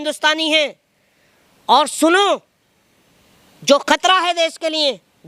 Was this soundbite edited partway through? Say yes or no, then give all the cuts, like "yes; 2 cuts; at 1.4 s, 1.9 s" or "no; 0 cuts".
no; 0 cuts